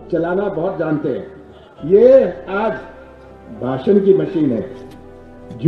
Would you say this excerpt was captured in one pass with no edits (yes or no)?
yes